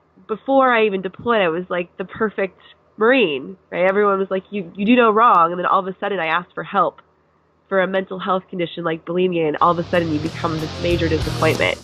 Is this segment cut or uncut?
uncut